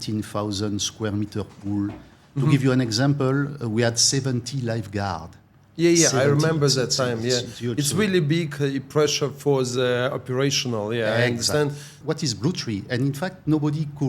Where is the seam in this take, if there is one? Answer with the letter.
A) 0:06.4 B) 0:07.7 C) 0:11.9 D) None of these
C